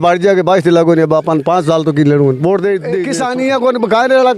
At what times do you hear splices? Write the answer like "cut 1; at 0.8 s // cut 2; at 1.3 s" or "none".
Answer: cut 1; at 3.1 s